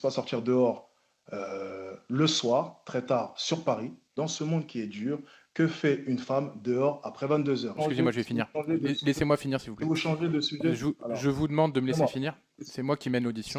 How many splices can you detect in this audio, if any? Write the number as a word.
two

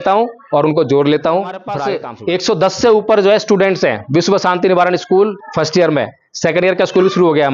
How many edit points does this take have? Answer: one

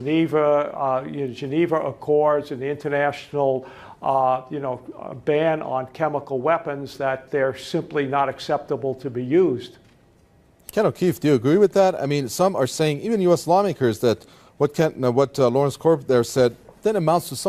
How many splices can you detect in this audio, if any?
one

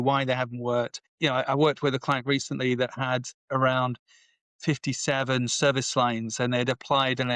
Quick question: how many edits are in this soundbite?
one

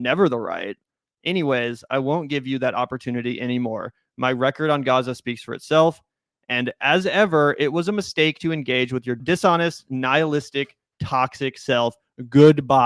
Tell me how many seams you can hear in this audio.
one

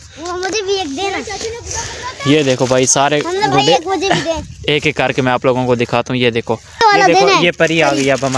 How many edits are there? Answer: one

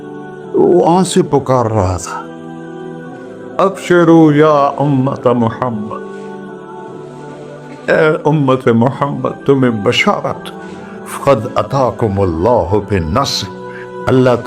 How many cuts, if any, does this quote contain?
zero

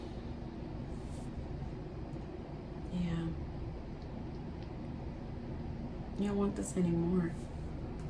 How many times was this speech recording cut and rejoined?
zero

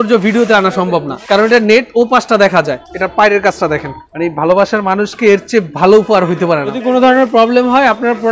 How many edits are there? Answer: four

